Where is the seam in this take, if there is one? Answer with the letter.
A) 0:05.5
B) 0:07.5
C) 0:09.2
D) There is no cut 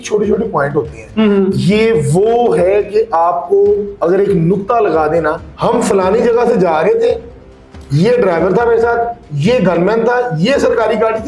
A